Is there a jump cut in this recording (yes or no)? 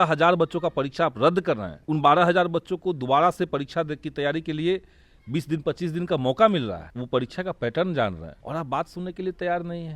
yes